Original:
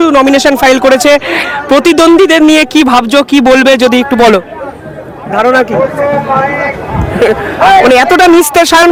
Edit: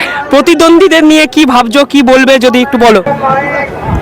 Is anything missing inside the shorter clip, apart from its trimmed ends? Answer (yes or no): yes